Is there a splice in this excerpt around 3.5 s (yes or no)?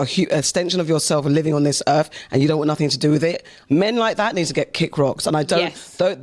yes